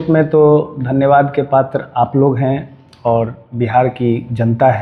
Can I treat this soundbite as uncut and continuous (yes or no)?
yes